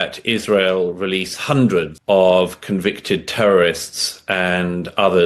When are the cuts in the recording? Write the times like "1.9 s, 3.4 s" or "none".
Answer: 1.9 s